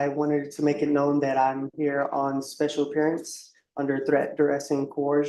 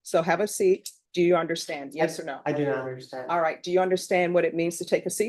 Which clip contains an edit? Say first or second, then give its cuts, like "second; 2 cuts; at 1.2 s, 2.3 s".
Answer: second; 1 cut; at 1.0 s